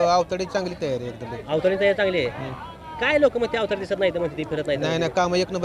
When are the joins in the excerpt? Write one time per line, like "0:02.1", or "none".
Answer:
none